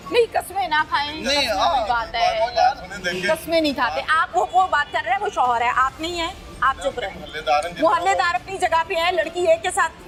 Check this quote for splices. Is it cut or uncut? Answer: uncut